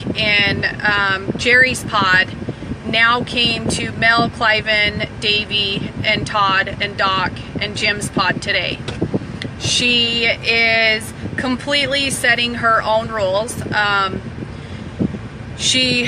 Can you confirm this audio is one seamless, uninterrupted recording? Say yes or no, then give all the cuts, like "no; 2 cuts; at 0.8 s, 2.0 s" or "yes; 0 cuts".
no; 1 cut; at 5.8 s